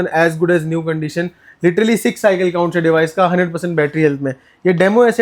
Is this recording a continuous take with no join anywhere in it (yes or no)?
yes